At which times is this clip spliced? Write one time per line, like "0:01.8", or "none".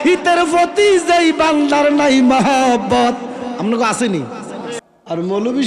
0:04.7